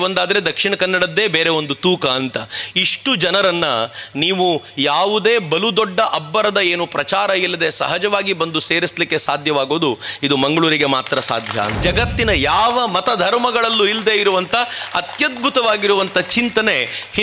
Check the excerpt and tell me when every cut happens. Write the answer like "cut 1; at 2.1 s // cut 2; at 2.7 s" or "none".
cut 1; at 11.7 s